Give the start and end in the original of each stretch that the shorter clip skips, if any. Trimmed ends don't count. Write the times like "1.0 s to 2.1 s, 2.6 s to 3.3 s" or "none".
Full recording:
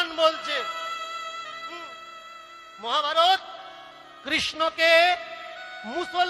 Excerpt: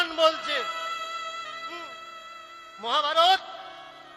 none